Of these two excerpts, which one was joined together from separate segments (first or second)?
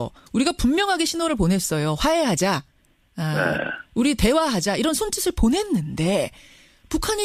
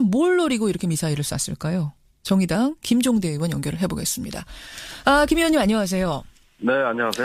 second